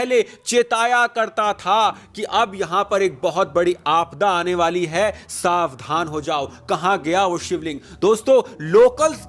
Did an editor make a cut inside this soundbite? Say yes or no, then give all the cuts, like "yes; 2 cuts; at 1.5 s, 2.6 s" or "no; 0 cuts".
no; 0 cuts